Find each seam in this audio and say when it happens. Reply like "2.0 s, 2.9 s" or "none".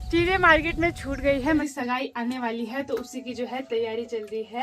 1.6 s